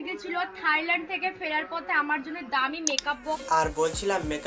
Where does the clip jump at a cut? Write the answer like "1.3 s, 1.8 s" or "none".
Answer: 3.4 s